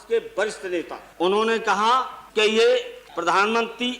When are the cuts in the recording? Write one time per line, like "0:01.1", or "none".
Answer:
0:01.0
0:02.2
0:03.0